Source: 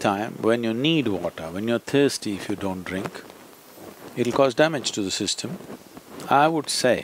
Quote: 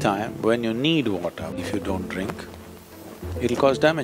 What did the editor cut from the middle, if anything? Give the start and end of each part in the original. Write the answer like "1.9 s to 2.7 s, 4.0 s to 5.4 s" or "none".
1.6 s to 2.3 s